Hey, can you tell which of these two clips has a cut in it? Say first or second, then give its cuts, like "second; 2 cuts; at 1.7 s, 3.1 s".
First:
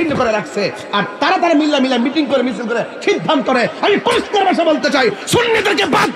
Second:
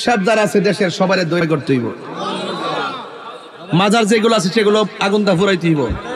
second; 1 cut; at 1.4 s